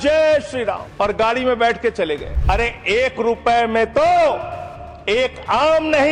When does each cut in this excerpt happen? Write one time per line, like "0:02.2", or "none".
0:00.9
0:02.3